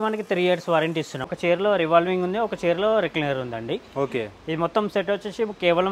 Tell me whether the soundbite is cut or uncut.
cut